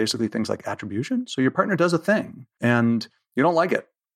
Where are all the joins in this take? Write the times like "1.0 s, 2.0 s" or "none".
2.4 s

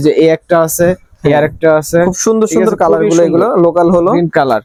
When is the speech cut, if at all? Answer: none

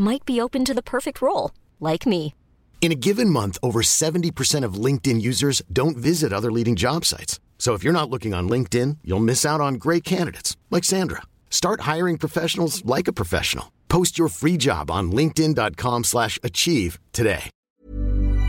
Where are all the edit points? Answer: 17.6 s

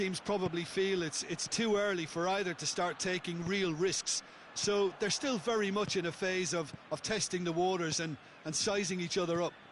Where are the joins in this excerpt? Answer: none

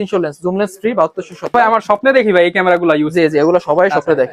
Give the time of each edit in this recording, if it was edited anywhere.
1.5 s

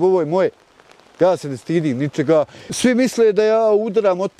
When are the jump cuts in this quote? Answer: 2.6 s

